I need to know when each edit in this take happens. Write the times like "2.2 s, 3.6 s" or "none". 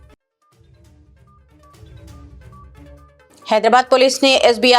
2.4 s